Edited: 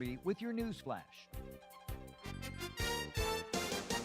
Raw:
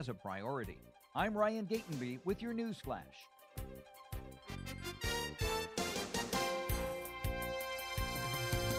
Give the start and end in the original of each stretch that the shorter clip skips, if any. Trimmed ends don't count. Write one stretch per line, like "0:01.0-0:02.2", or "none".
0:03.2-0:03.4